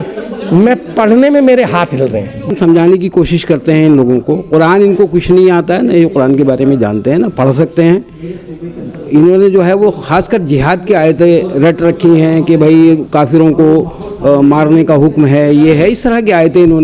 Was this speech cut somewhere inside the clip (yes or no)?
yes